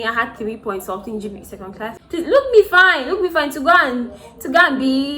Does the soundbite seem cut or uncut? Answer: cut